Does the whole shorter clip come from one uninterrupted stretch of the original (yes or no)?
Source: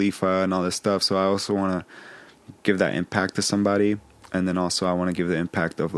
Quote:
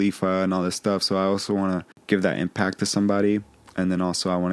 no